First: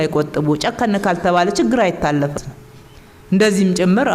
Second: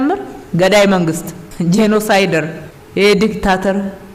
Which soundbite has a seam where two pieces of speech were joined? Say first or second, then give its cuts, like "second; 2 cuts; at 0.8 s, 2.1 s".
first; 1 cut; at 2.5 s